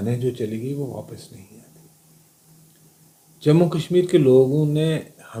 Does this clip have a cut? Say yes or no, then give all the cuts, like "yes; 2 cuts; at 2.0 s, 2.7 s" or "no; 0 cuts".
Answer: no; 0 cuts